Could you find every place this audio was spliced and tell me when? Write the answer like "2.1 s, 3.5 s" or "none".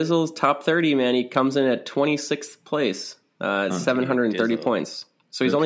none